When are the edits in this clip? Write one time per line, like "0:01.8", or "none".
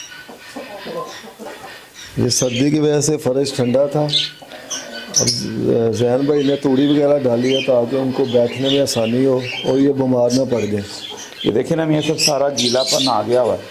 none